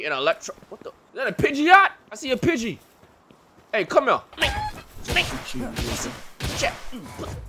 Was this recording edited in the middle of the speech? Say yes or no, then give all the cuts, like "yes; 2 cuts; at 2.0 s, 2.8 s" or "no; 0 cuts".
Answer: no; 0 cuts